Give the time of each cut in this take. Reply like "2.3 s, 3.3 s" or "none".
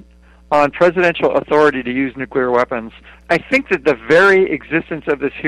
3.2 s